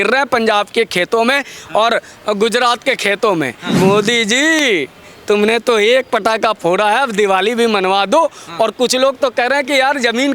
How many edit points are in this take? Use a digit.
1